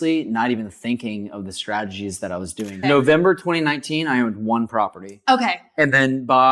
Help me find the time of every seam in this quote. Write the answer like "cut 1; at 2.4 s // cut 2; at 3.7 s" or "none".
cut 1; at 2.8 s